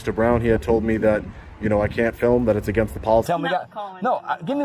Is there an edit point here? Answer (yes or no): yes